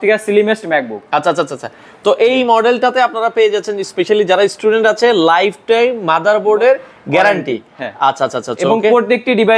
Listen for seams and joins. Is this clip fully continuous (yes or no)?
yes